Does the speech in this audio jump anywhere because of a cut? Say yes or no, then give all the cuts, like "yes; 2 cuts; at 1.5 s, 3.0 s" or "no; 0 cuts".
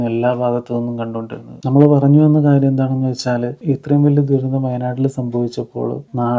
no; 0 cuts